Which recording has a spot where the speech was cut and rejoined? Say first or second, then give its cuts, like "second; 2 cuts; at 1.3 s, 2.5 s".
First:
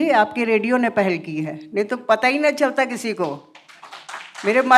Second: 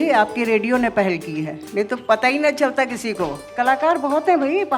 second; 1 cut; at 3.5 s